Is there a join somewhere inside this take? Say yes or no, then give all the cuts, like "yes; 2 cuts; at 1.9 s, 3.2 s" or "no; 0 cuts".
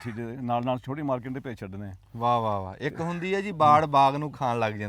no; 0 cuts